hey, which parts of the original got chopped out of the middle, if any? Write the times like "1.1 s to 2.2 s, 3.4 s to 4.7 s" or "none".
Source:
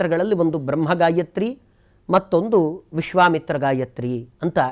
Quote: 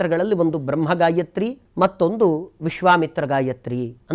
1.6 s to 1.9 s